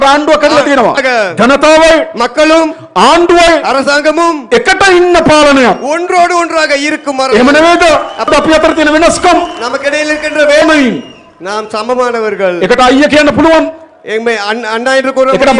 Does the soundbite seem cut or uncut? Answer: cut